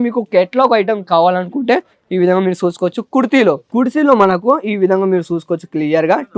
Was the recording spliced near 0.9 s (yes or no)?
no